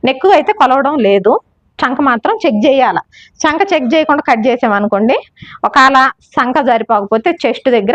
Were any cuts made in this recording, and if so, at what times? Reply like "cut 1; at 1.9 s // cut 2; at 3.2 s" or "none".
none

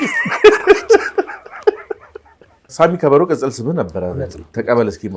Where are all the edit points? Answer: cut 1; at 2.7 s

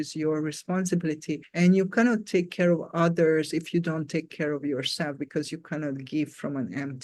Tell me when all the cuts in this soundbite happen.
none

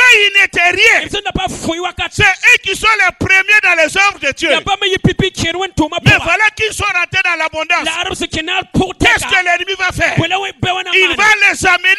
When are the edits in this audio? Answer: none

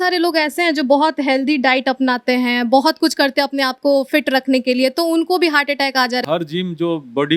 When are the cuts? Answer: cut 1; at 6.2 s

